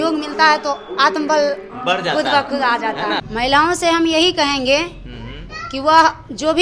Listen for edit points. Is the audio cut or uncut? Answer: cut